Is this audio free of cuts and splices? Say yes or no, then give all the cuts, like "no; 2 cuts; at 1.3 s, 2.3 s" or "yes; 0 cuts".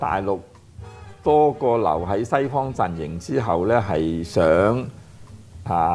yes; 0 cuts